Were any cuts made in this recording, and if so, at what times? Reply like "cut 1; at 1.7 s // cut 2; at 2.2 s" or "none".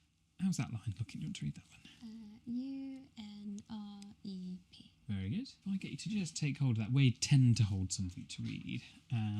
cut 1; at 5.6 s